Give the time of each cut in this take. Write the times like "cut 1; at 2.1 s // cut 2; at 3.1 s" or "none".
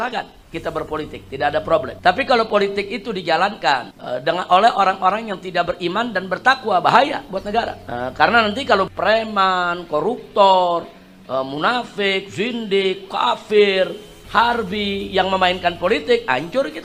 none